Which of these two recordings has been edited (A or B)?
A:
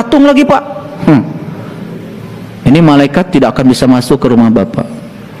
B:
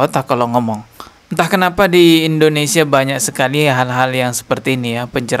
B